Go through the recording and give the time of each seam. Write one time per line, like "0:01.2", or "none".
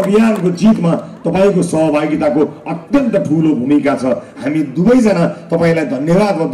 none